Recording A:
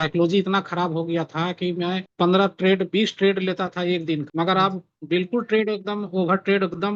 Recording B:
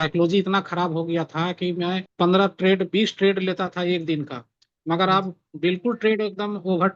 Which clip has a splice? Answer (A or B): A